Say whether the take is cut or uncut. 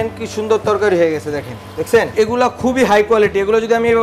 cut